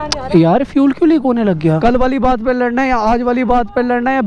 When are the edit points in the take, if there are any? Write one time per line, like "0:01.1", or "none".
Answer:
0:01.8